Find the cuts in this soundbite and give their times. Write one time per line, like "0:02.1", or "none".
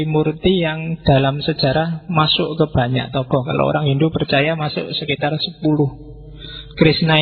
none